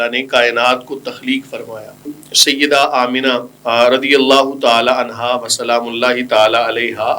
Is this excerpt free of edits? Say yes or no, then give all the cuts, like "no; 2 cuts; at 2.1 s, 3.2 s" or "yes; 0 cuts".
no; 2 cuts; at 2.1 s, 3.5 s